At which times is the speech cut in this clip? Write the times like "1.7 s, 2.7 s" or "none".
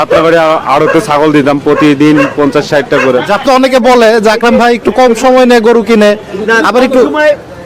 3.5 s